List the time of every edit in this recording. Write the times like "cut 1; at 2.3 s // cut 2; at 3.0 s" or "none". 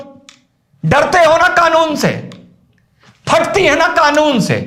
none